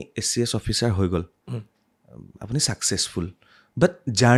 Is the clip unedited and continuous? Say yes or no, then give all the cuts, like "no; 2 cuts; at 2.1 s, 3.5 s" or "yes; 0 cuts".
yes; 0 cuts